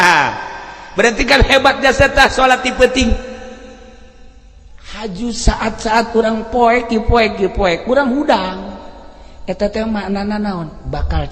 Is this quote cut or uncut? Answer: uncut